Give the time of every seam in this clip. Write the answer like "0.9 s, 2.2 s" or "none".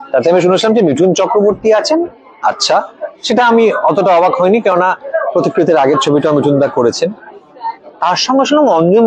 none